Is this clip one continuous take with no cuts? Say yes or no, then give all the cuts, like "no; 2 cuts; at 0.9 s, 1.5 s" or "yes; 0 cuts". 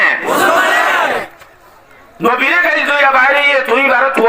no; 1 cut; at 1.4 s